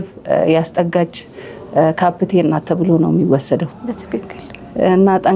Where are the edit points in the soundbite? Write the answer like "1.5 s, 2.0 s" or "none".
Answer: none

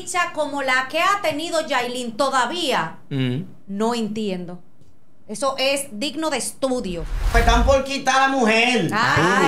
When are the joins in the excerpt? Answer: 7.3 s

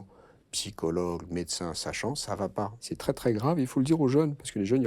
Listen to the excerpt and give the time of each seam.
2.8 s

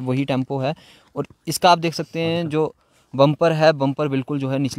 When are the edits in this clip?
none

